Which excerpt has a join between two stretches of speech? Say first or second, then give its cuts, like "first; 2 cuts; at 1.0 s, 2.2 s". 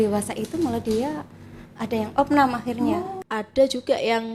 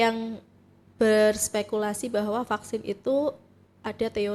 first; 1 cut; at 3.1 s